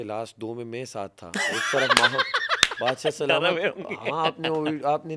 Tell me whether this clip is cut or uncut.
uncut